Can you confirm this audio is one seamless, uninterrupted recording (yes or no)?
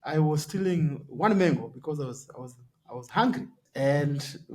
no